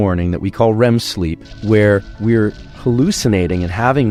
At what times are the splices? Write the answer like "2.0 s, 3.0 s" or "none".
none